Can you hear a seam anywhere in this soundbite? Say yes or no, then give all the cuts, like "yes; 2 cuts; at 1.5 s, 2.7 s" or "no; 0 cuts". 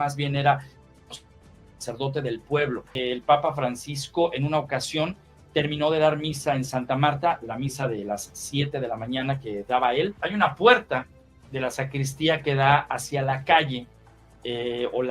yes; 2 cuts; at 2.9 s, 10.2 s